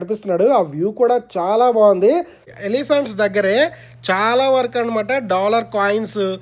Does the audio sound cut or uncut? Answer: cut